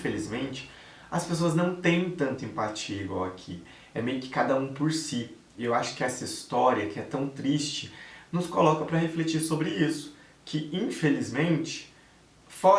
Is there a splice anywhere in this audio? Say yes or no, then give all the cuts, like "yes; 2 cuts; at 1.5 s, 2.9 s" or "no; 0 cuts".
no; 0 cuts